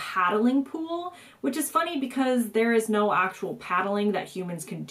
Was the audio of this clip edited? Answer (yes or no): no